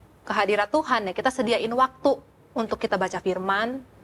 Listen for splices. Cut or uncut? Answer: uncut